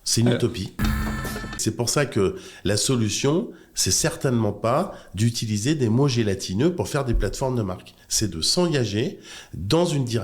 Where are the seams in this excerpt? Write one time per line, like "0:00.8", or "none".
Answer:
0:01.0